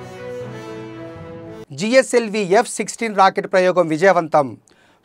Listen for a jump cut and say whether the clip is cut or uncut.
uncut